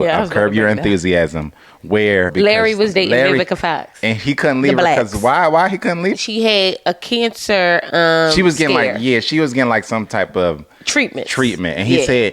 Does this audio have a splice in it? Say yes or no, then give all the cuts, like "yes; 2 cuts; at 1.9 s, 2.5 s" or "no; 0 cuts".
yes; 2 cuts; at 2.3 s, 6.2 s